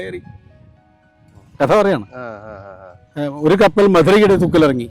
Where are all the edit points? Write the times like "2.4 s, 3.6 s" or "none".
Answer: 3.0 s